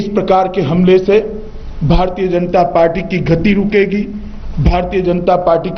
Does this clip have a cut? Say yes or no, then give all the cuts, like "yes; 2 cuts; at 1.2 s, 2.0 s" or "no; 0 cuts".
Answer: no; 0 cuts